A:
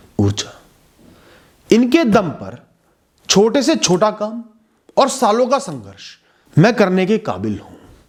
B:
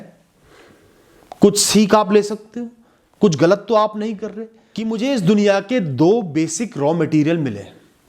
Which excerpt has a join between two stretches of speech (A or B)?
B